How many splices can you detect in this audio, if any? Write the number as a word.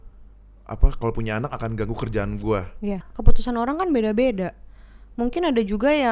one